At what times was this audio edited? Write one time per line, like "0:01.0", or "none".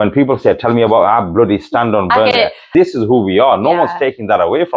0:02.3